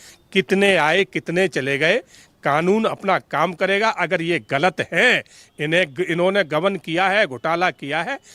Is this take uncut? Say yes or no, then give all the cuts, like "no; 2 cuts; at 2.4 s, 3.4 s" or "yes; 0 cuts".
yes; 0 cuts